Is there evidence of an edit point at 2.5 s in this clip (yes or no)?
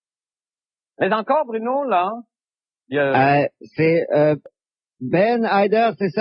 no